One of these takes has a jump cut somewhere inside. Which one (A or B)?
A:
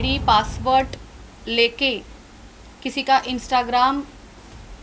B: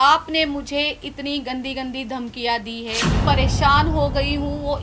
B